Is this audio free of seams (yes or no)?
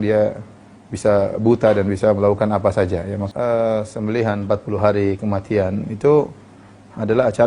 no